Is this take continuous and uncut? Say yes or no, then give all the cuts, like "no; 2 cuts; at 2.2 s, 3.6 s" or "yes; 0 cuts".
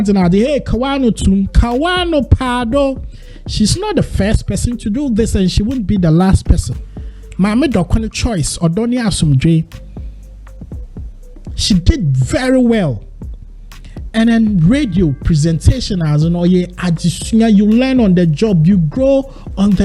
no; 2 cuts; at 10.2 s, 11.6 s